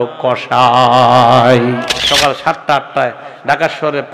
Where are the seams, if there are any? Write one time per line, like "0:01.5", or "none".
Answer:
0:01.9